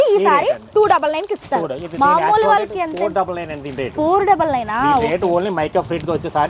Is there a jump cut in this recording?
no; 0 cuts

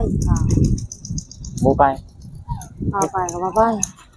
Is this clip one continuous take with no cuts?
yes; 0 cuts

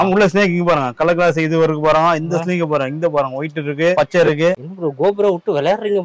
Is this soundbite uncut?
yes; 0 cuts

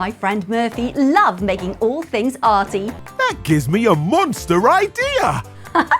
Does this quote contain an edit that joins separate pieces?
yes; 1 cut; at 3.0 s

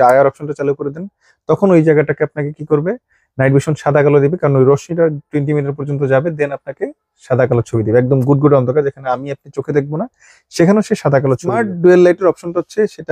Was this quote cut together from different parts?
yes; 1 cut; at 11.5 s

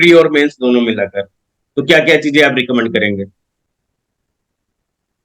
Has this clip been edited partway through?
no; 0 cuts

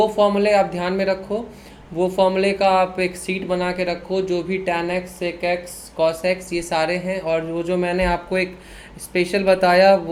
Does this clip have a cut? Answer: no; 0 cuts

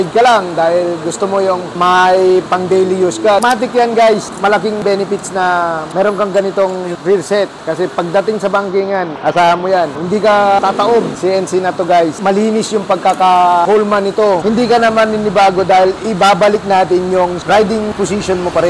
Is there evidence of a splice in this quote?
yes; 4 cuts; at 3.4 s, 11.1 s, 12.2 s, 14.4 s

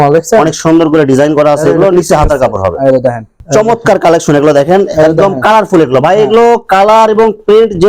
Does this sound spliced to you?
yes; 1 cut; at 3.4 s

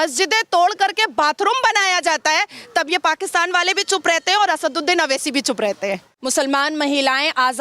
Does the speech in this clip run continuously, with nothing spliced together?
no; 1 cut; at 6.1 s

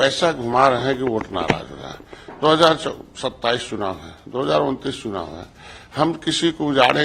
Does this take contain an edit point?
no; 0 cuts

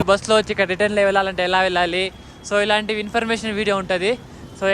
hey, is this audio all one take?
yes; 0 cuts

